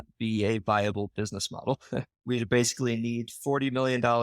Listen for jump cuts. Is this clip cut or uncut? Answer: cut